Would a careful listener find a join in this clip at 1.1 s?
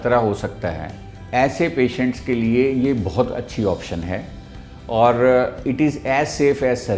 yes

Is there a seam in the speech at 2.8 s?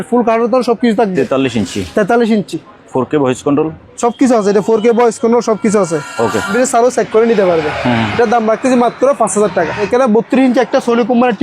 no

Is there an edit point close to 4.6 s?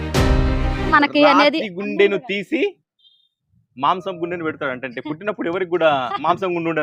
no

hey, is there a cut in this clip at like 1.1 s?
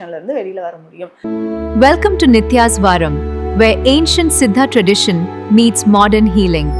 yes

